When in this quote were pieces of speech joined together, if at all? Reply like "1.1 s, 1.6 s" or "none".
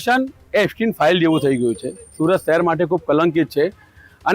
none

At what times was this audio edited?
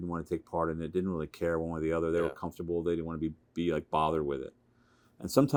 none

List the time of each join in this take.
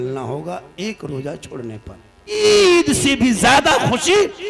2.4 s

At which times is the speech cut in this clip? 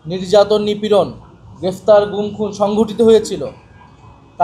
none

